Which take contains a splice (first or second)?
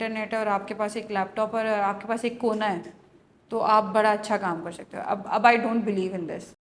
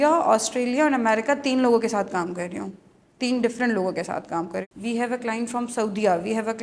second